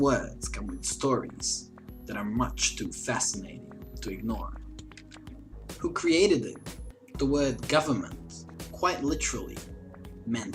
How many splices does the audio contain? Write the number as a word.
zero